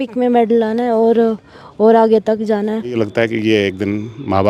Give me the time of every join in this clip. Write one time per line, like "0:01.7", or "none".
0:03.0